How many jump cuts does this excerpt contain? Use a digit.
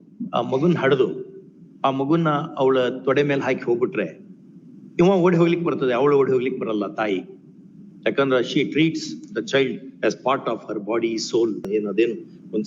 1